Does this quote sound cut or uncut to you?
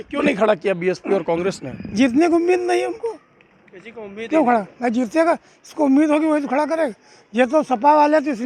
uncut